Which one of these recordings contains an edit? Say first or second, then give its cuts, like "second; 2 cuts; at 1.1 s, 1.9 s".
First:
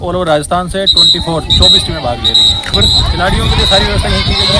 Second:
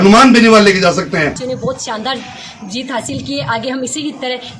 second; 1 cut; at 1.4 s